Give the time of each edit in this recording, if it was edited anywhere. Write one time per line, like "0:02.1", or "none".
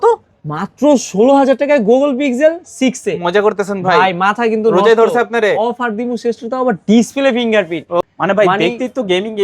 0:08.1